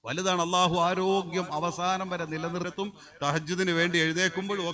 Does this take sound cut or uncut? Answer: cut